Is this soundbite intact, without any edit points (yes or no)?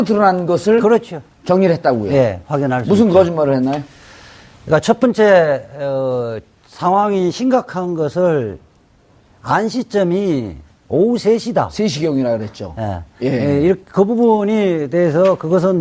yes